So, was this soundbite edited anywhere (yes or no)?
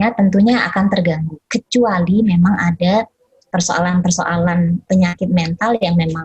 yes